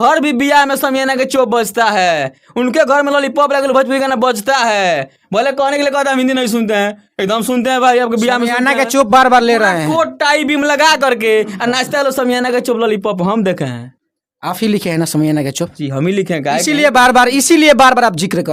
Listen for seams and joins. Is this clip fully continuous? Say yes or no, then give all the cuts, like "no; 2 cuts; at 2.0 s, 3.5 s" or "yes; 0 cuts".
yes; 0 cuts